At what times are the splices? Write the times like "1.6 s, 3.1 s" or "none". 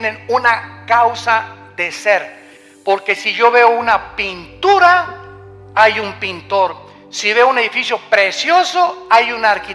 2.6 s